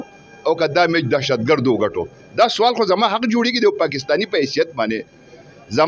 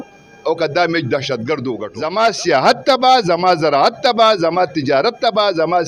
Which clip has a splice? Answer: second; 1 cut; at 1.9 s

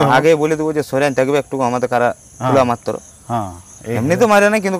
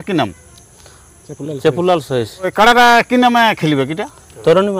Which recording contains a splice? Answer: second; 1 cut; at 2.5 s

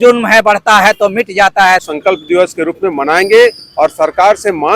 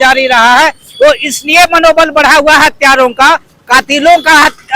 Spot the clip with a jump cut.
first; 1 cut; at 1.8 s

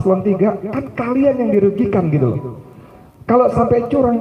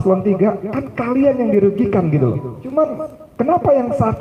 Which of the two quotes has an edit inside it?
second; 1 cut; at 2.5 s

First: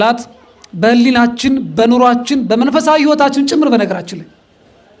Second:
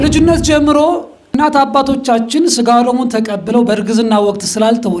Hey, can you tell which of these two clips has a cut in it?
second; 1 cut; at 1.2 s

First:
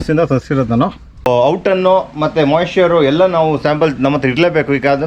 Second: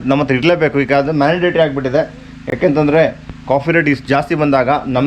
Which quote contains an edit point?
first; 1 cut; at 1.3 s

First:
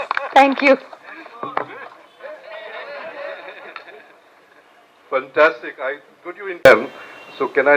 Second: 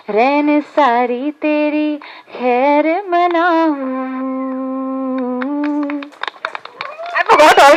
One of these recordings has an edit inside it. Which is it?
first; 1 cut; at 6.6 s

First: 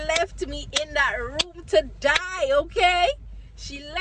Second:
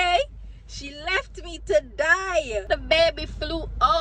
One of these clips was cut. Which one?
second; 1 cut; at 2.6 s

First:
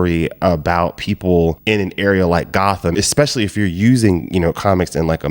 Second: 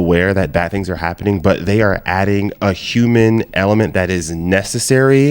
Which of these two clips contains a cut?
first; 1 cut; at 2.9 s

